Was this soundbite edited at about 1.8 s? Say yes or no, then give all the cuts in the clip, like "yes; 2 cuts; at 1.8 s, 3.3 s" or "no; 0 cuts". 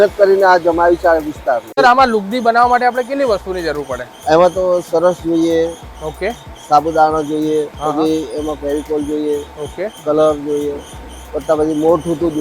yes; 1 cut; at 1.8 s